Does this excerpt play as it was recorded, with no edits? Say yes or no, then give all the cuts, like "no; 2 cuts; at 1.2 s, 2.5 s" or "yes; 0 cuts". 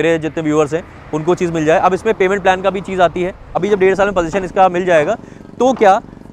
no; 1 cut; at 3.6 s